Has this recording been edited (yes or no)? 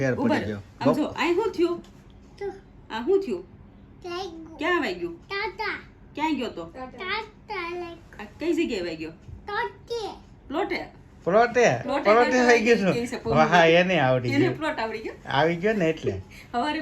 no